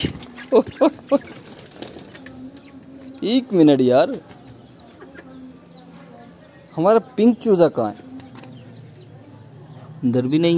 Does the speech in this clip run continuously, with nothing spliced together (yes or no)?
yes